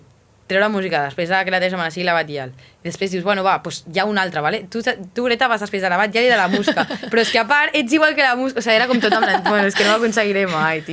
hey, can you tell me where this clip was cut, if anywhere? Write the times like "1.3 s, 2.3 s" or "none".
none